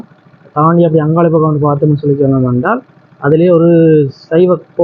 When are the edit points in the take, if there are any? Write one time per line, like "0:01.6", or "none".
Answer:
none